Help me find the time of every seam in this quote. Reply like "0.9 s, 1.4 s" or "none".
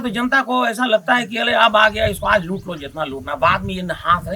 none